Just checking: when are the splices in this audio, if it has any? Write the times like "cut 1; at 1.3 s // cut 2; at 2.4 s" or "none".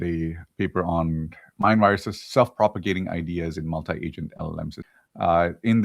cut 1; at 2.8 s // cut 2; at 4.8 s